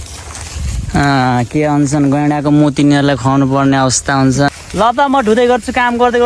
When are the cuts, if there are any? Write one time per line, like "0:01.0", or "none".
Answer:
0:02.9
0:04.5